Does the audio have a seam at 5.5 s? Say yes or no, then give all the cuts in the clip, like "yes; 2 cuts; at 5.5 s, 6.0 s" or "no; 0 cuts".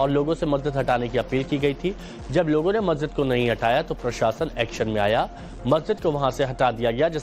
yes; 1 cut; at 5.5 s